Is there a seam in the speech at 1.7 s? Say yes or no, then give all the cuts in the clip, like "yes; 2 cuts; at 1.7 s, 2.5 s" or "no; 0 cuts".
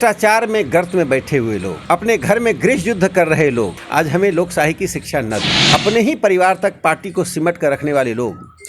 yes; 3 cuts; at 1.7 s, 3.8 s, 5.5 s